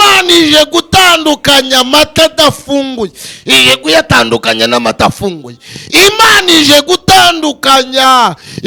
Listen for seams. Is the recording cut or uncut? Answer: uncut